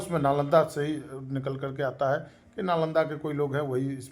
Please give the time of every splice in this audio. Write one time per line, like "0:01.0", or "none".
none